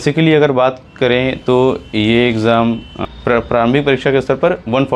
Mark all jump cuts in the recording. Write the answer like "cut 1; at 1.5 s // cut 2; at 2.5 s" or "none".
cut 1; at 3.1 s